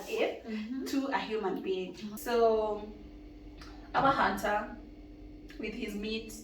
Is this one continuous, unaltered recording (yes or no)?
no